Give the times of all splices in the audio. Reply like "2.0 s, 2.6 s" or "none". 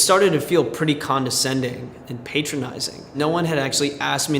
3.1 s